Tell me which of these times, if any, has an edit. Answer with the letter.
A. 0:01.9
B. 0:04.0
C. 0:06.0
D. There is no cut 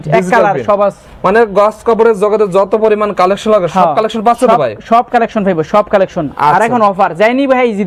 D